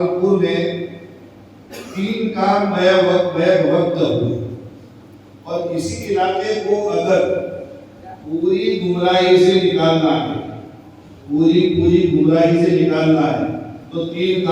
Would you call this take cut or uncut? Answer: uncut